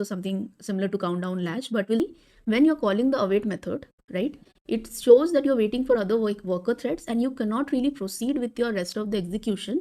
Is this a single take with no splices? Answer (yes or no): no